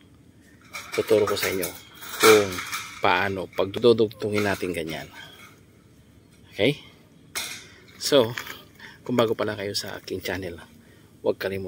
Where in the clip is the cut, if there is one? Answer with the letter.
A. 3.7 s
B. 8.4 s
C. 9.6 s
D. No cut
A